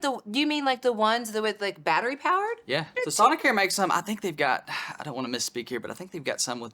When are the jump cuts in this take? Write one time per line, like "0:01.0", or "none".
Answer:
0:02.9